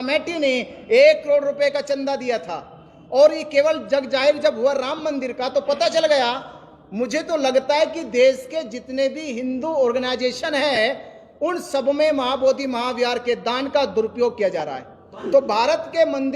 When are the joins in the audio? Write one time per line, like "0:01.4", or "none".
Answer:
0:15.2